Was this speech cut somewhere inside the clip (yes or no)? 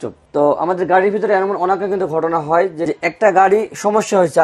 yes